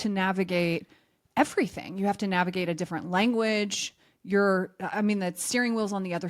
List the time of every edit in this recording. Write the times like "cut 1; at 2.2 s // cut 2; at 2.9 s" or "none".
none